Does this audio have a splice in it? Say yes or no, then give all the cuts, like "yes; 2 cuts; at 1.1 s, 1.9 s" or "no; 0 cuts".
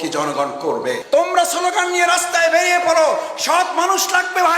yes; 1 cut; at 1.0 s